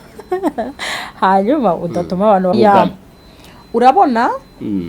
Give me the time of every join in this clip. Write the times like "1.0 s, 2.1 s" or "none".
2.5 s